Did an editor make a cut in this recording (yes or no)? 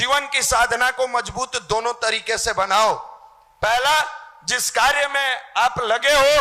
no